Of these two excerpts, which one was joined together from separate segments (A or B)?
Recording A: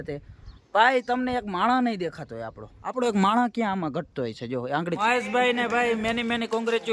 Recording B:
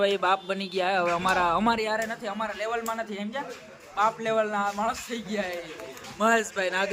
A